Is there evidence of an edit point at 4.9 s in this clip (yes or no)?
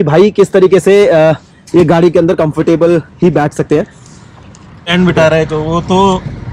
yes